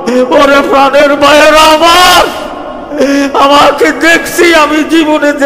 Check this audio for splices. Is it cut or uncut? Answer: uncut